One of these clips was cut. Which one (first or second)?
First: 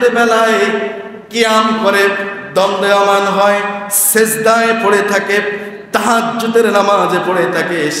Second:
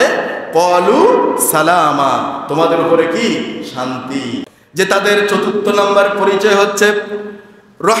second